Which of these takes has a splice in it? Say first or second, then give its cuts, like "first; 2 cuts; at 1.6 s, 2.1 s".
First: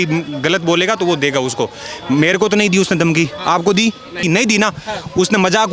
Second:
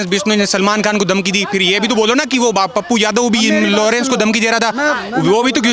first; 1 cut; at 4.2 s